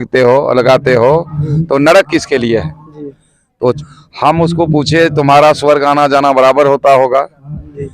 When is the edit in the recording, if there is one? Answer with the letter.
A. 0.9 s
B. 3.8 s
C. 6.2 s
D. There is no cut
B